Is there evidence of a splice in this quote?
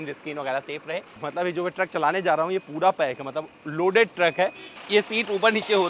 yes; 2 cuts; at 1.2 s, 4.7 s

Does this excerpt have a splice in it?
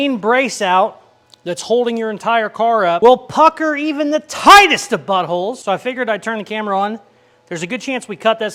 no; 0 cuts

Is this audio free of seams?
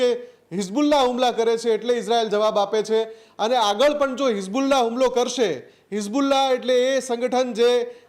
yes; 0 cuts

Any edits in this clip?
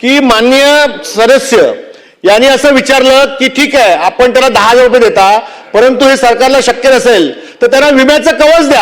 no; 0 cuts

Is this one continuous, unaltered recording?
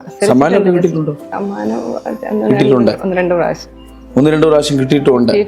yes; 0 cuts

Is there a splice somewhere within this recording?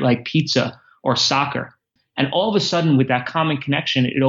yes; 1 cut; at 2.0 s

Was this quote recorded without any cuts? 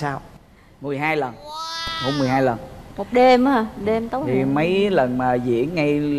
yes; 0 cuts

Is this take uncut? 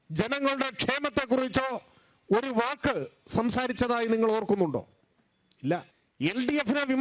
no; 1 cut; at 6.0 s

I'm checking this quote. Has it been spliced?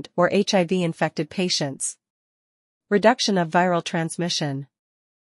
no; 0 cuts

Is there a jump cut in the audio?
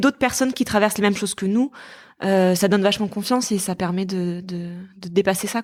no; 0 cuts

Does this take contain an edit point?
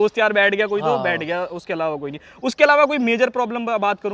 no; 0 cuts

